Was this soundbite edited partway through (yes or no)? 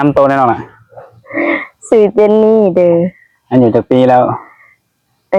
no